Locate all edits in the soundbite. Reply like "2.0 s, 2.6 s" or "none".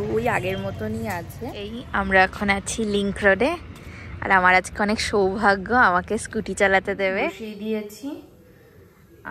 1.6 s, 7.4 s